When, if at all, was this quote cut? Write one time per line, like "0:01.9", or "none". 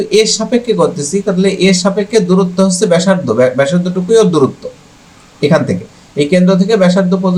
none